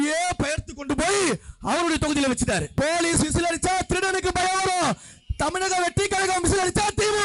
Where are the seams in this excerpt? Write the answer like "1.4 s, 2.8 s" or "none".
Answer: 2.7 s